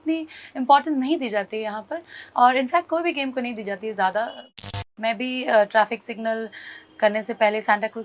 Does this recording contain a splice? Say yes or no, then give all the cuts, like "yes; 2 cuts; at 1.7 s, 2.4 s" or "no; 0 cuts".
yes; 1 cut; at 4.4 s